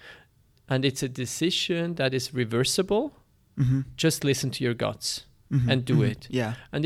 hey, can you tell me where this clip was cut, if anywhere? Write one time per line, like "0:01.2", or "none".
none